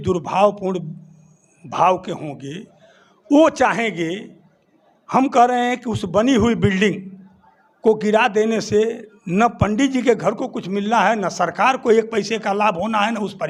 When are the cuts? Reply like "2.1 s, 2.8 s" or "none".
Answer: none